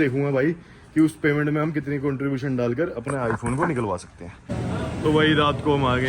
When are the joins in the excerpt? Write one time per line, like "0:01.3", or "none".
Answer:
0:04.3